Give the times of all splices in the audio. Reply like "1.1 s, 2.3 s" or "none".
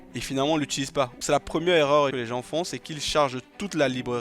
1.2 s, 2.1 s

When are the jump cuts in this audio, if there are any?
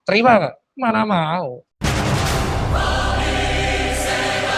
1.7 s

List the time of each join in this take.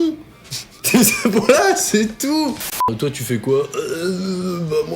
2.7 s

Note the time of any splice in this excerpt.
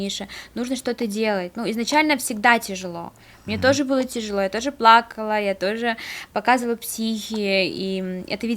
none

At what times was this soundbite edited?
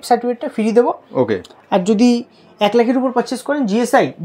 none

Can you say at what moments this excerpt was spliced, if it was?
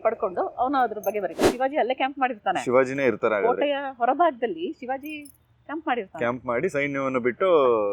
1.5 s

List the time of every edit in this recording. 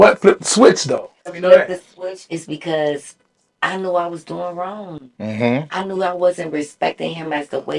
1.4 s

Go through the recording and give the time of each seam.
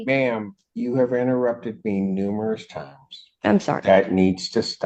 none

